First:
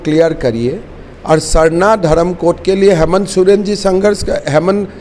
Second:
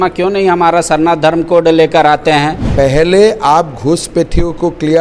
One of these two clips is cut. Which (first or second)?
second